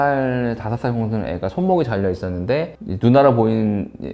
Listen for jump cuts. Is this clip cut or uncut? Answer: uncut